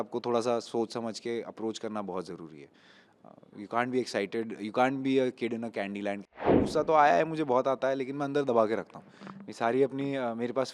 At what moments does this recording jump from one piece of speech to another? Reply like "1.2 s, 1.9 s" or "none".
6.5 s